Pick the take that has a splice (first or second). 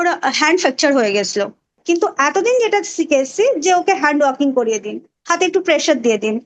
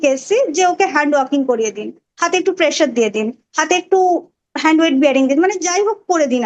first